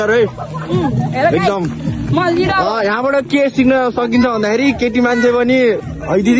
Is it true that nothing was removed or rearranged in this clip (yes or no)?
yes